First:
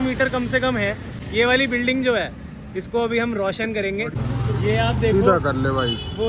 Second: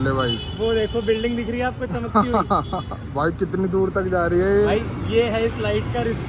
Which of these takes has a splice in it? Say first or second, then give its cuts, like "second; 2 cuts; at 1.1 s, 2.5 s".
first; 2 cuts; at 1.2 s, 4.1 s